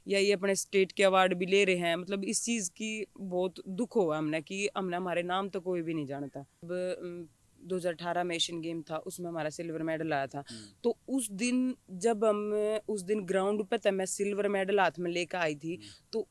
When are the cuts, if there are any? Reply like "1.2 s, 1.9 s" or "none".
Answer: 6.7 s